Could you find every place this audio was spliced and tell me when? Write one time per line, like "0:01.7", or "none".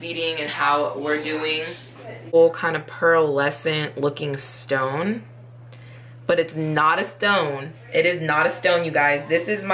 0:02.3